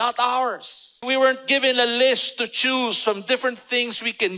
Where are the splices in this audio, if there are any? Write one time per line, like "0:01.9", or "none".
0:01.0